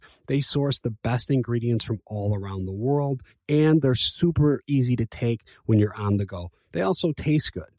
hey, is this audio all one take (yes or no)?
yes